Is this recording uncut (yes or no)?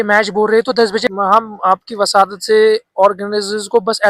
no